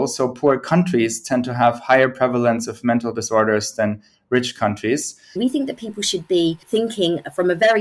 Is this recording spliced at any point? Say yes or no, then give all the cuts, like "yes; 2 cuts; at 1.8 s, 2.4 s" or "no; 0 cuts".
yes; 2 cuts; at 5.4 s, 6.6 s